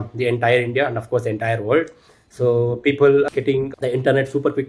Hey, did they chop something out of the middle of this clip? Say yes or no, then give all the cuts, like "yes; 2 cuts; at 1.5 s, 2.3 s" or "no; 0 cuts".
yes; 1 cut; at 3.3 s